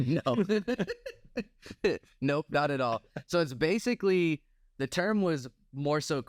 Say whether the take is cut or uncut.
uncut